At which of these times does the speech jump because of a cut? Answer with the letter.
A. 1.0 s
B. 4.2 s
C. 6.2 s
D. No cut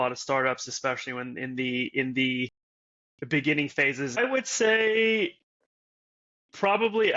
B